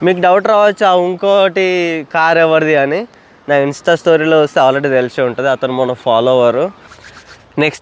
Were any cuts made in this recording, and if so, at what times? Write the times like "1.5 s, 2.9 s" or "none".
6.9 s